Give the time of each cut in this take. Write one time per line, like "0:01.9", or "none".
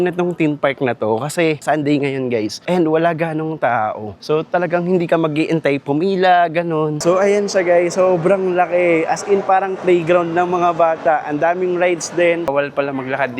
0:07.0
0:12.4